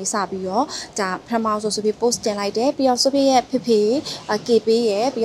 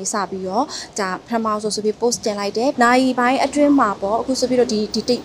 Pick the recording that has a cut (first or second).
second